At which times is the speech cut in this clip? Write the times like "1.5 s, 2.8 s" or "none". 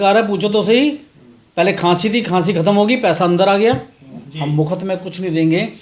4.0 s